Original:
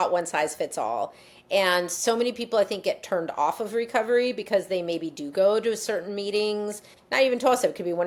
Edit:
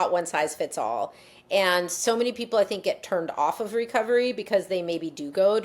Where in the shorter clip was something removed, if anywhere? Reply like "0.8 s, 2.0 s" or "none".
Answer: none